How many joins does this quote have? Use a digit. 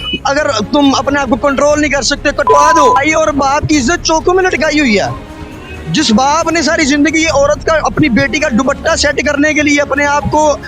1